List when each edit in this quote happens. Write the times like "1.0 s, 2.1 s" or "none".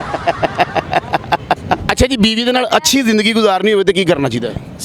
1.9 s